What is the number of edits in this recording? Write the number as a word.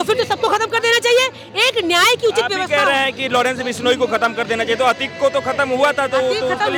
zero